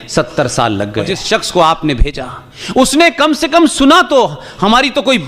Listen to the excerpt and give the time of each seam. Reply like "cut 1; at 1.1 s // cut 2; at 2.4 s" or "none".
cut 1; at 1.2 s